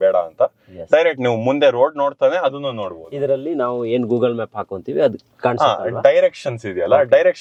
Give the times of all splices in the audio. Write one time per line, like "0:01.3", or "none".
none